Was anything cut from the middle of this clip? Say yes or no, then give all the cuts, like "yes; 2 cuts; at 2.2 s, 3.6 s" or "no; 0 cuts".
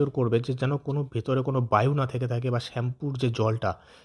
no; 0 cuts